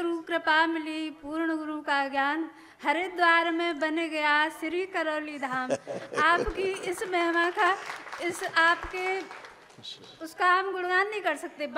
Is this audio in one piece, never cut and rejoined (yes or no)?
yes